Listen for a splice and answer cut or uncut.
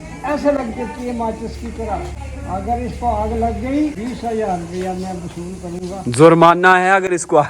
cut